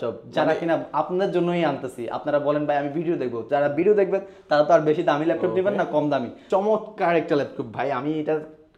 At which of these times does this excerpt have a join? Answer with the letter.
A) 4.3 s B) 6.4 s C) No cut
B